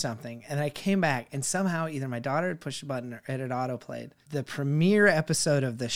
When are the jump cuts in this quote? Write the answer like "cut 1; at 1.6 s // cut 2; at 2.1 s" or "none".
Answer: cut 1; at 4.1 s